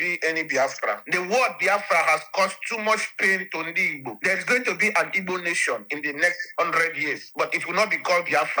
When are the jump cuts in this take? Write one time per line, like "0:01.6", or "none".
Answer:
0:01.0